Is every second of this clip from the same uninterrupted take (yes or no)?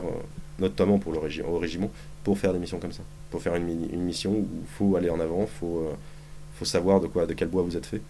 no